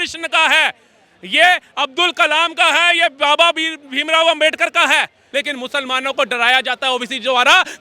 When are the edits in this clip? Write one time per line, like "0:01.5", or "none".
0:05.2

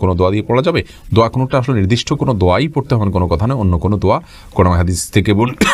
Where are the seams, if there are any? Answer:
none

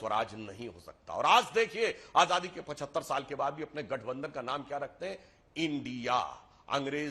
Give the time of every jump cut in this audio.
none

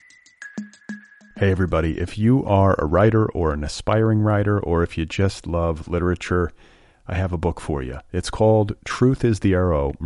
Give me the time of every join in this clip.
0:00.9

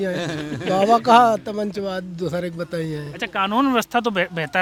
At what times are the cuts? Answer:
none

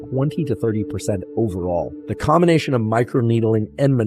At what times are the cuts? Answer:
0:02.0

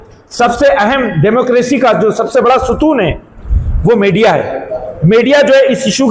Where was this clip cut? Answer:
none

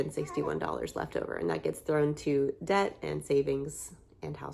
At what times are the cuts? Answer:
none

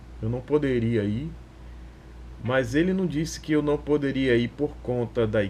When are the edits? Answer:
none

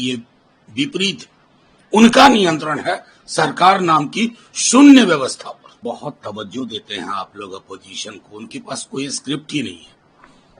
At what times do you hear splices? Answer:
0:05.7

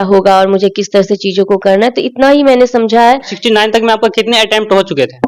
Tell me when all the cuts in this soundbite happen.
0:03.3

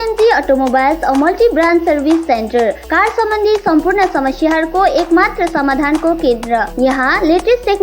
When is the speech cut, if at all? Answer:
none

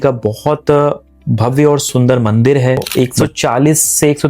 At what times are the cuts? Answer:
0:01.9
0:02.9

